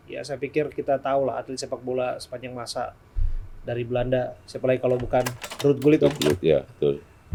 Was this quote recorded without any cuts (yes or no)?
yes